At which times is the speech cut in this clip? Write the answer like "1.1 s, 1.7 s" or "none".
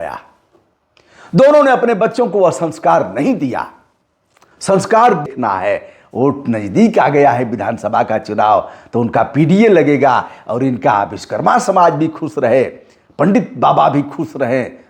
5.3 s